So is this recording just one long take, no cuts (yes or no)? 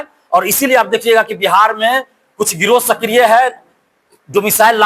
yes